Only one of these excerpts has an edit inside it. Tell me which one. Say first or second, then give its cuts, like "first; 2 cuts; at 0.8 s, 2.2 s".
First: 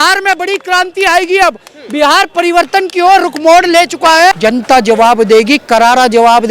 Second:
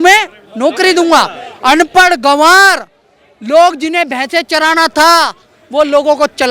first; 1 cut; at 4.4 s